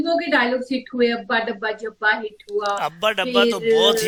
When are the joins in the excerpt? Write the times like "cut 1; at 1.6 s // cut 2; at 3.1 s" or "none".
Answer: none